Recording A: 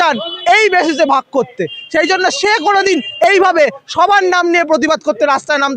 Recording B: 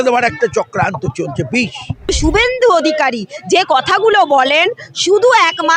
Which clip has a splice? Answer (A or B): B